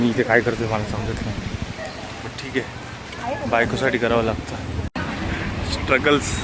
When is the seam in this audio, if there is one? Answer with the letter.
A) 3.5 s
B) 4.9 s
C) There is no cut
B